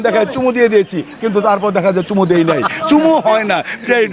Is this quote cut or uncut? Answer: uncut